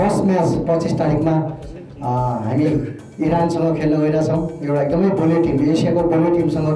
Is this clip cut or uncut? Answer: uncut